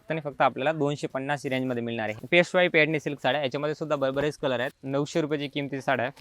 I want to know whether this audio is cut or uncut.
cut